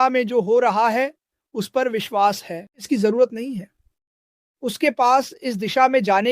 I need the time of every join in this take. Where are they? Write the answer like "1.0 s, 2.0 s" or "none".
2.8 s